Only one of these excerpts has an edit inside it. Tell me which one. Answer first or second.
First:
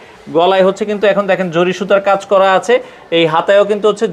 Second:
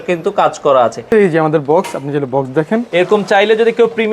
second